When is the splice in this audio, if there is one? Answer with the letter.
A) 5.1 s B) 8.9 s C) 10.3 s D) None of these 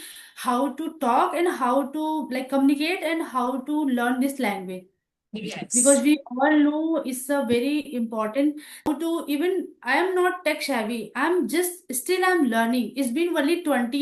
B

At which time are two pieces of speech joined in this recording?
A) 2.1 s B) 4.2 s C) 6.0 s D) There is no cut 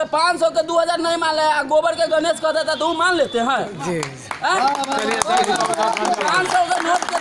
D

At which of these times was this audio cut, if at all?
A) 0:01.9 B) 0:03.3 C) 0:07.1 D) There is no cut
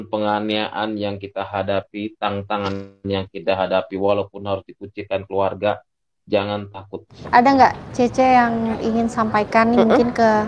C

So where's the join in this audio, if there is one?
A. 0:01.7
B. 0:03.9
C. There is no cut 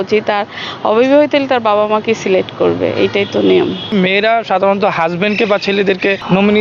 B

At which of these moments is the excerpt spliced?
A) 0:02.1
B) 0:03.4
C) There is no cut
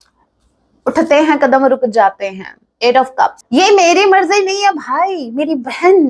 B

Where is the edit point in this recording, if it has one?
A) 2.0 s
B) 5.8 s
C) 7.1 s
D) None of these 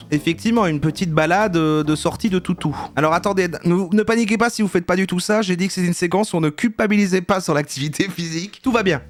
D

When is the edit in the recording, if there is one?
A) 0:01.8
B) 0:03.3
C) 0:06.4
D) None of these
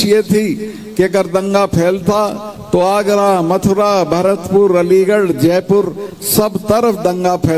D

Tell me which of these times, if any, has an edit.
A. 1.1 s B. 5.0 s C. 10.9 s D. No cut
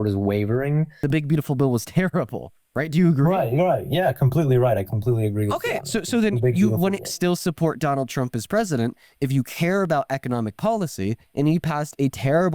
A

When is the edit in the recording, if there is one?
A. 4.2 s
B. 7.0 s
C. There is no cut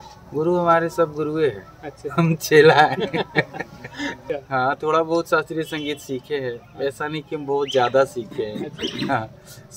A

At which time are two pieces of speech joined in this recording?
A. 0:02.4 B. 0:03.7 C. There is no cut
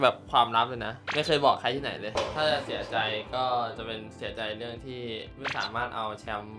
A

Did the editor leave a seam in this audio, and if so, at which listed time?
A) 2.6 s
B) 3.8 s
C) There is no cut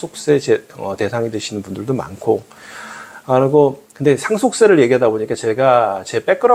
C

